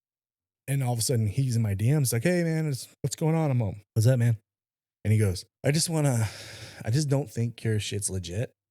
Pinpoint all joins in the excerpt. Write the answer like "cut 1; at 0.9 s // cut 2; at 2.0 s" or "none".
cut 1; at 2.9 s // cut 2; at 3.8 s // cut 3; at 5.5 s